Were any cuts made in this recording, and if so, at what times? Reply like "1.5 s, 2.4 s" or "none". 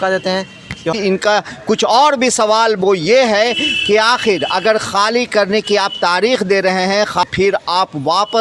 0.9 s, 7.2 s